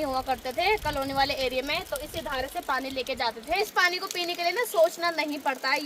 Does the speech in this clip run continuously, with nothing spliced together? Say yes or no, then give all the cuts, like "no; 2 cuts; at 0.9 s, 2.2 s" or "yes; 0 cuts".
no; 1 cut; at 3.7 s